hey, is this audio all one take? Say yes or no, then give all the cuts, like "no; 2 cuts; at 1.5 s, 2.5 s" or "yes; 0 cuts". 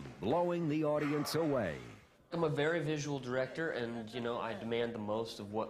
yes; 0 cuts